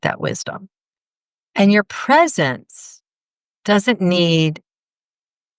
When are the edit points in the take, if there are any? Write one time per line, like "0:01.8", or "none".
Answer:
none